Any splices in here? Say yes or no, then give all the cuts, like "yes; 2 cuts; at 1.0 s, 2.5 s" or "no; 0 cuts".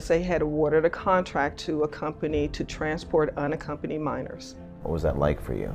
yes; 1 cut; at 4.8 s